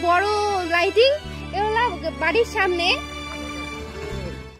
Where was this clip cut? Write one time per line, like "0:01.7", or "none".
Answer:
none